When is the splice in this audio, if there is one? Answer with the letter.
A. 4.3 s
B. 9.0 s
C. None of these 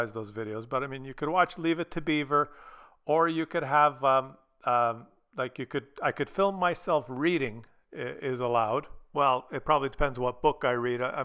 B